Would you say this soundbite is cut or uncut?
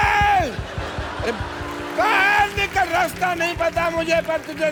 uncut